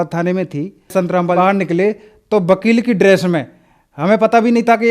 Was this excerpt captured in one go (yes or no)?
no